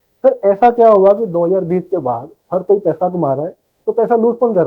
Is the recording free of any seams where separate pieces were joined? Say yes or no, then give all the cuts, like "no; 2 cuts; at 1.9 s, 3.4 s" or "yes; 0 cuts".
yes; 0 cuts